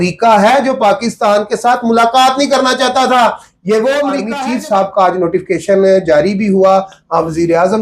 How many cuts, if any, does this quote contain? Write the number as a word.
one